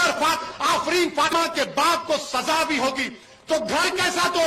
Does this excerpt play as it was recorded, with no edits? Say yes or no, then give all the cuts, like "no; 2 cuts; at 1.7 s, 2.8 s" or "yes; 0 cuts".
no; 1 cut; at 1.3 s